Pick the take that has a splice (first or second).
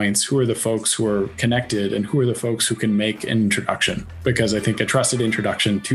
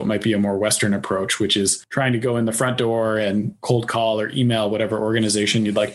second